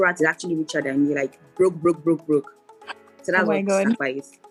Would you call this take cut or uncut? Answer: uncut